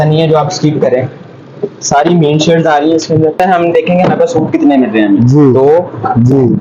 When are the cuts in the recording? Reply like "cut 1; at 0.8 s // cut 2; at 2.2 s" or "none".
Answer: cut 1; at 3.4 s